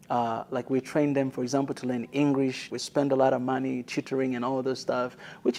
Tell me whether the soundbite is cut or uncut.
cut